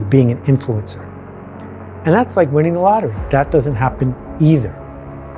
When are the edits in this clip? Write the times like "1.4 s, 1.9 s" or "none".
none